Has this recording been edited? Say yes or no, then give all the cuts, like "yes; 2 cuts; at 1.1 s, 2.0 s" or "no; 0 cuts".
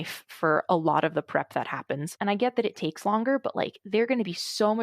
yes; 1 cut; at 2.1 s